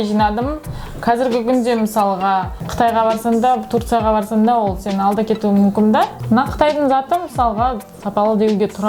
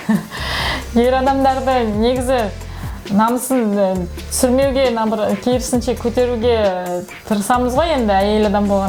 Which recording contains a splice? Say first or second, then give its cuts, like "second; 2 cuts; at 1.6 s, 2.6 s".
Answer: first; 2 cuts; at 2.6 s, 6.2 s